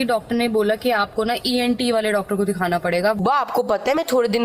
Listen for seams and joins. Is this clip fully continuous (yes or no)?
no